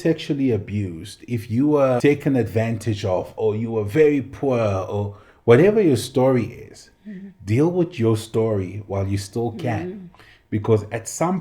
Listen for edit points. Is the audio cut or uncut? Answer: cut